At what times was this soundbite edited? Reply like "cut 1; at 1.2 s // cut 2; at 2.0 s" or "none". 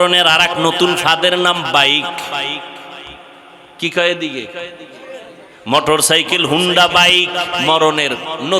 none